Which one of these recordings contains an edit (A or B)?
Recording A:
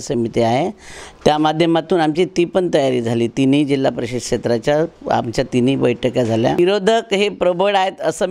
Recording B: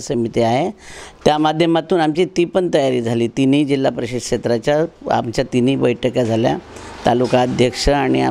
A